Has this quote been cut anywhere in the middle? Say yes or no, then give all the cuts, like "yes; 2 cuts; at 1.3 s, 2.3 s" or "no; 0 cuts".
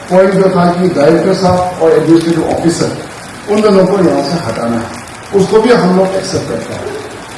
no; 0 cuts